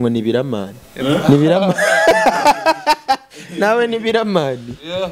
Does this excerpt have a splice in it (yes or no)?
no